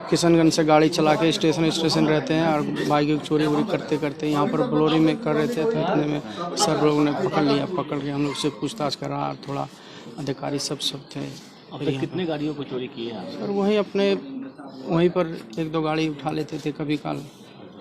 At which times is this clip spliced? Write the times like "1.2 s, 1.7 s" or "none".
none